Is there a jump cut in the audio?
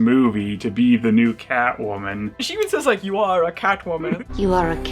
yes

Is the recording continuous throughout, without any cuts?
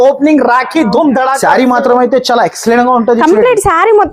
no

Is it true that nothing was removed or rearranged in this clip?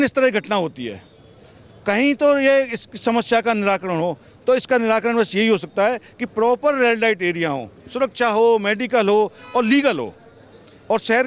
yes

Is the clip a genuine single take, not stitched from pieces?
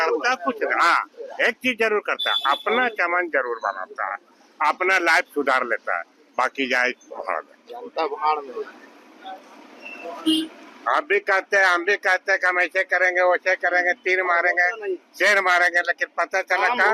yes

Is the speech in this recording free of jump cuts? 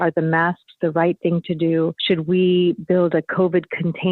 no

